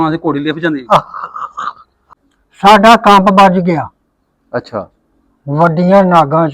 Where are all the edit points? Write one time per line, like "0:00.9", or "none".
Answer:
0:01.9